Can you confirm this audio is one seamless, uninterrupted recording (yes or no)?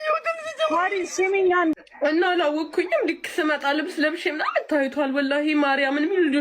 no